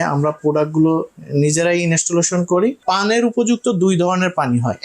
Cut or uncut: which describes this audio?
cut